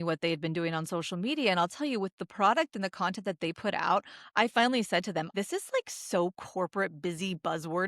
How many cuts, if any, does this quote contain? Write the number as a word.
one